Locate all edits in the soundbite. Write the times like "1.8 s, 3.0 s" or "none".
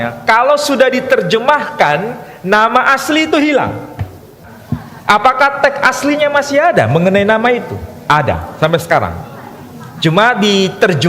4.6 s